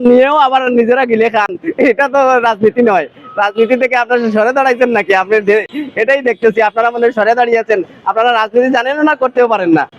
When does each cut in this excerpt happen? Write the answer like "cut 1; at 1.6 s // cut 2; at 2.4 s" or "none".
none